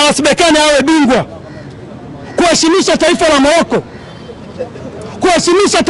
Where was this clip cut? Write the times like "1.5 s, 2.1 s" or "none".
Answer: none